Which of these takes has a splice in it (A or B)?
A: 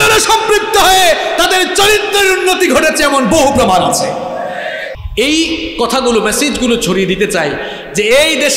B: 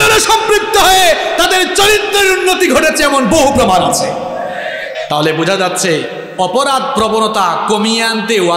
A